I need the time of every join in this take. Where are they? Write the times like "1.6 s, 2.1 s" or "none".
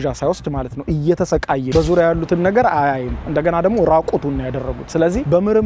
1.7 s